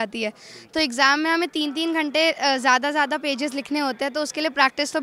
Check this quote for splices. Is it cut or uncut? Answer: uncut